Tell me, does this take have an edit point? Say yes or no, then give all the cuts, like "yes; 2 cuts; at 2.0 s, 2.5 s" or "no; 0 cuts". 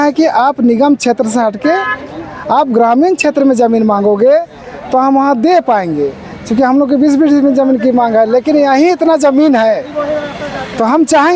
no; 0 cuts